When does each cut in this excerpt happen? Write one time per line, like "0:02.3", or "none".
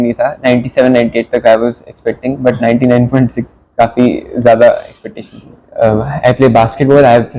0:05.6